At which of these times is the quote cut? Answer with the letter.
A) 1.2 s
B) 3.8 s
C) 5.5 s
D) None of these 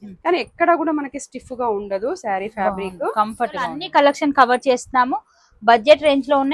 B